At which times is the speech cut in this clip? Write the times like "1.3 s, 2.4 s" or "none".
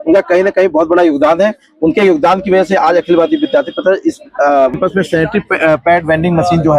4.8 s